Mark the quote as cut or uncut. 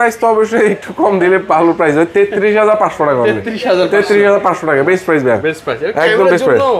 uncut